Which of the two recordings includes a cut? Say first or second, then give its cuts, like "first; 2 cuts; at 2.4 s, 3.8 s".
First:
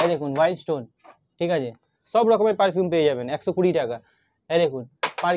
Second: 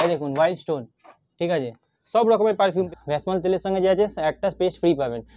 second; 1 cut; at 2.9 s